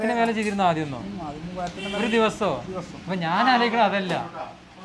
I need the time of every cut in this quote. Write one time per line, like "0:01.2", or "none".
none

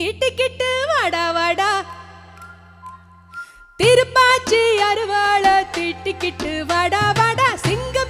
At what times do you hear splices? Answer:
none

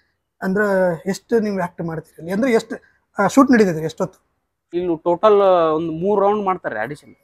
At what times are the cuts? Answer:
0:04.7

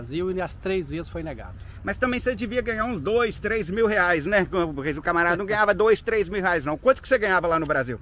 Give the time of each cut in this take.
none

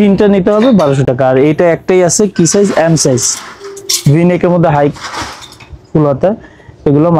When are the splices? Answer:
none

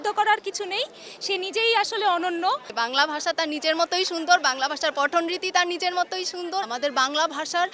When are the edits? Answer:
0:02.7
0:06.6

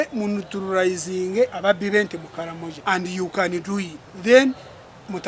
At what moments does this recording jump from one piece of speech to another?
0:01.6
0:02.7
0:04.0

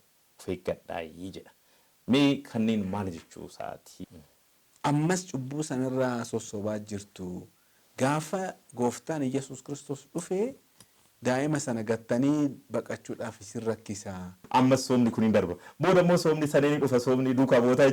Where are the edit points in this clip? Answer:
0:04.0
0:14.4

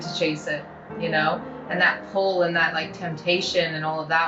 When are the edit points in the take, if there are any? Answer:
none

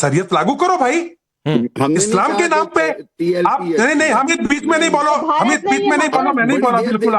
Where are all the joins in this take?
0:04.5

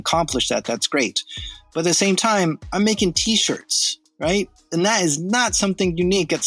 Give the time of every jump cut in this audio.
none

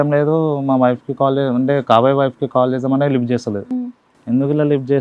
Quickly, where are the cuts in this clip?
none

